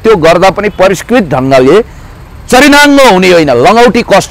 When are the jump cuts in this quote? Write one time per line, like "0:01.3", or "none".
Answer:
none